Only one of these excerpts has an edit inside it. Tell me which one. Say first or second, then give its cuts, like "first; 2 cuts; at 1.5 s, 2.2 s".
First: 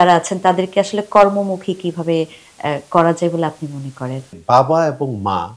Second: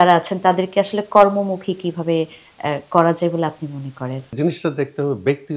first; 1 cut; at 4.3 s